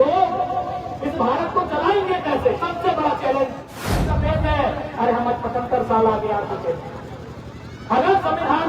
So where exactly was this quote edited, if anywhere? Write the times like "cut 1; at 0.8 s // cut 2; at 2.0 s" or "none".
cut 1; at 4.1 s